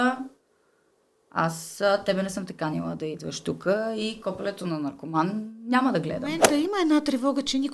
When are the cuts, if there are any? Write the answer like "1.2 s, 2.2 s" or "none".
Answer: 6.4 s